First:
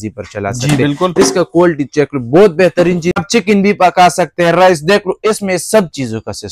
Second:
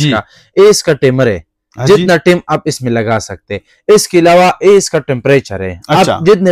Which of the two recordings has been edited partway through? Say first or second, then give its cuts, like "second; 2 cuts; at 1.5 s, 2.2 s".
first; 1 cut; at 3.2 s